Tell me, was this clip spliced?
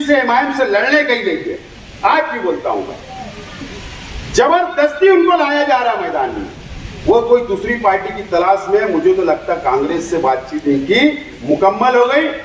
no; 0 cuts

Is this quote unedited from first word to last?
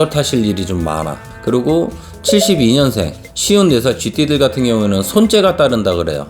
no; 1 cut; at 1.2 s

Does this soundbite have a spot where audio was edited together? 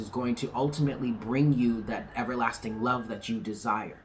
no; 0 cuts

